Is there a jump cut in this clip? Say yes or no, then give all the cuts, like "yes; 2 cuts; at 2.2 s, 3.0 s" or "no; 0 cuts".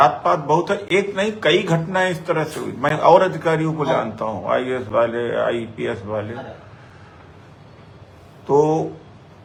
no; 0 cuts